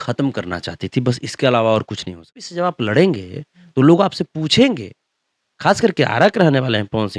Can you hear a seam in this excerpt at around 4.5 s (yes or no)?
no